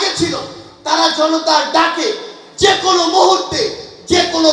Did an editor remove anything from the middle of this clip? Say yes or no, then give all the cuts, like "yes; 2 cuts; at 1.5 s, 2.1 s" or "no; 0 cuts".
no; 0 cuts